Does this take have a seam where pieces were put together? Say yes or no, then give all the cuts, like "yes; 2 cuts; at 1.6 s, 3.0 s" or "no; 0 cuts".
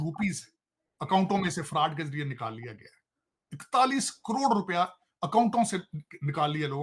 no; 0 cuts